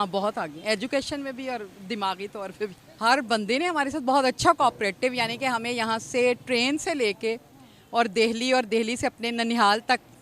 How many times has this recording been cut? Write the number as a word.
one